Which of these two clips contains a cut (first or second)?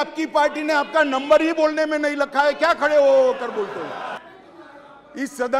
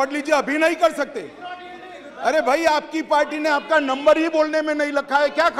first